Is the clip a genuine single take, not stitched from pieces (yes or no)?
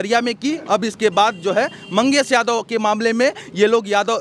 yes